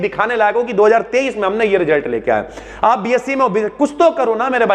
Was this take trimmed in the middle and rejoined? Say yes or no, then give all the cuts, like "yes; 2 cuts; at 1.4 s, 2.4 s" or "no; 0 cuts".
no; 0 cuts